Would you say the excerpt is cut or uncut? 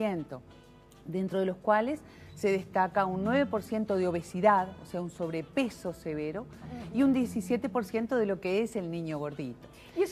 cut